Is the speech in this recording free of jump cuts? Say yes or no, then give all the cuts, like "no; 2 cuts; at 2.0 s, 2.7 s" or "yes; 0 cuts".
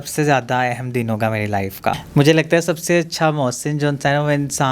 no; 1 cut; at 2.0 s